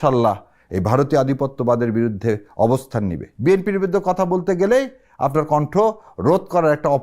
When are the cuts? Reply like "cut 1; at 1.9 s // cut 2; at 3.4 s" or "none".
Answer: cut 1; at 3.3 s